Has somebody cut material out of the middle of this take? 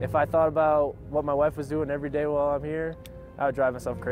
no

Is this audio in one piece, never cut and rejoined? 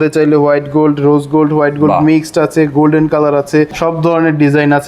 no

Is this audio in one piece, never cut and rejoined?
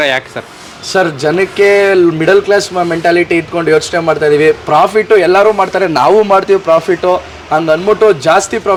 yes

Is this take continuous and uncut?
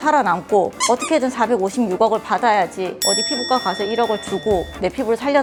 yes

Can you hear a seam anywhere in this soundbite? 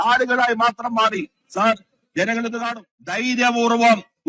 yes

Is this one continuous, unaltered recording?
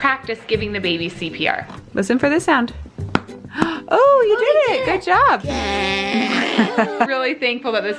no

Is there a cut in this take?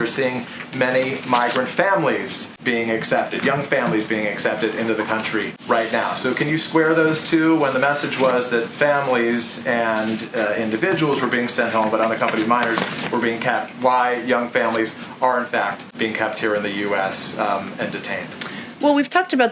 no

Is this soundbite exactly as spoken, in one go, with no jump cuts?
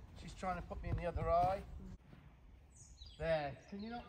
no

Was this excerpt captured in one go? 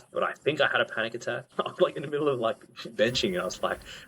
no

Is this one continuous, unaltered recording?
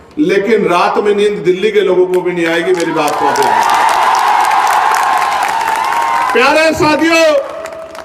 yes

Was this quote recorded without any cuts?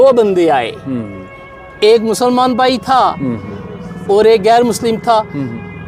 yes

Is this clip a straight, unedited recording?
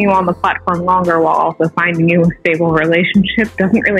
yes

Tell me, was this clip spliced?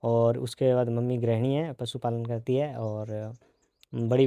no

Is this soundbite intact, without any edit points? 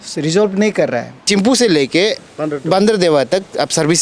no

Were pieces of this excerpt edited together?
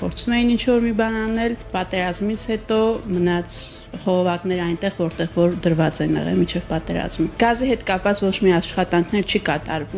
no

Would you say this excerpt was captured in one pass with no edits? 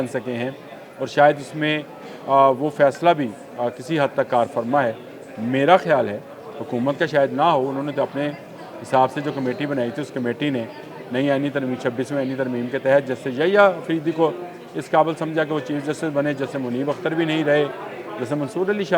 yes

